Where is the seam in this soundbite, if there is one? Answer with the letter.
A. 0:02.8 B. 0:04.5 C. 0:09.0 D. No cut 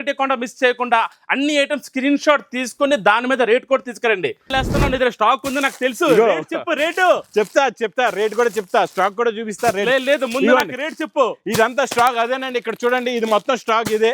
B